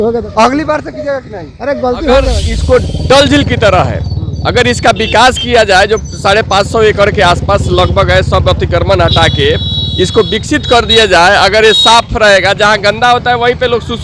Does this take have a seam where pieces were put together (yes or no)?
yes